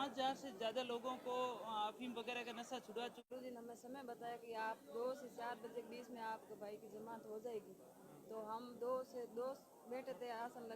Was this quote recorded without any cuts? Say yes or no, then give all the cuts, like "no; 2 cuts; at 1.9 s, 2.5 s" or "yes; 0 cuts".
no; 1 cut; at 3.3 s